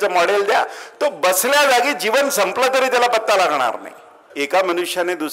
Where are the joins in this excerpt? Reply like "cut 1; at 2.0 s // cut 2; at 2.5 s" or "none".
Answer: cut 1; at 4.3 s